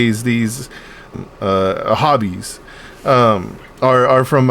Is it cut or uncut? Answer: cut